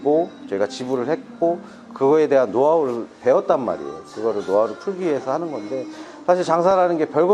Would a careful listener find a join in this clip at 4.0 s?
no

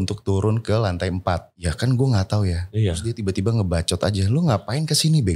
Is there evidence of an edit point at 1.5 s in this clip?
yes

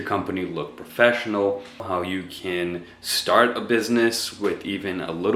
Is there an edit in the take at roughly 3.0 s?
no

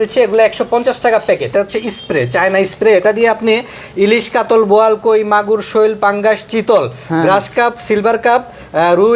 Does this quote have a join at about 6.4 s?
no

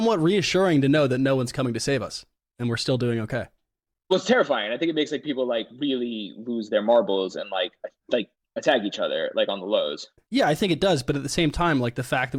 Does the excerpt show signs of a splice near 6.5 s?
no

